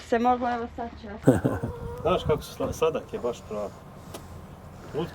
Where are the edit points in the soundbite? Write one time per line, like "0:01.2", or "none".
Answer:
0:01.2